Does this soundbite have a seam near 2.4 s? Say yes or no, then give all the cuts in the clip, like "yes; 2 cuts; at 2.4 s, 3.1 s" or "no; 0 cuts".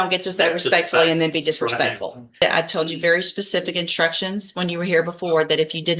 yes; 1 cut; at 2.4 s